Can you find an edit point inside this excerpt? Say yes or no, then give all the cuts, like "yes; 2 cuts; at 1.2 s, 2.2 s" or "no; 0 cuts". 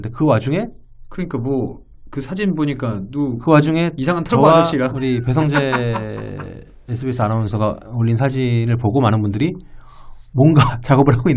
no; 0 cuts